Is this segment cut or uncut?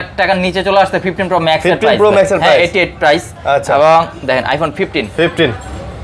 uncut